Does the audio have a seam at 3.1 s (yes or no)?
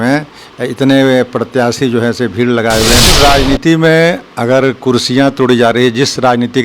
yes